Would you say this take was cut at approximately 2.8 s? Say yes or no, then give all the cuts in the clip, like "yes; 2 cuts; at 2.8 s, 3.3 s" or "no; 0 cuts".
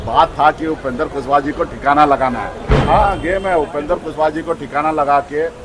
yes; 1 cut; at 2.8 s